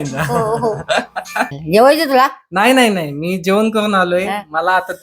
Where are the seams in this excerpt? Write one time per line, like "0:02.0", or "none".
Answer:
0:01.6